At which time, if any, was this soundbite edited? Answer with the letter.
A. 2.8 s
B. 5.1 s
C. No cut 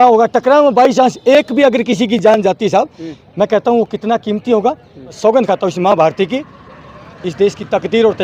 B